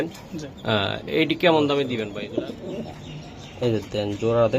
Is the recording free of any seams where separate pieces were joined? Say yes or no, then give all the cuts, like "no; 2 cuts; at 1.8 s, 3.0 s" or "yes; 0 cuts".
no; 1 cut; at 2.1 s